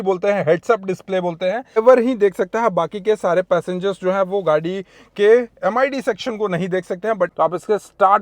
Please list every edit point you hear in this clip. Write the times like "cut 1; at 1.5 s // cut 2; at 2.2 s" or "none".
cut 1; at 1.8 s // cut 2; at 7.3 s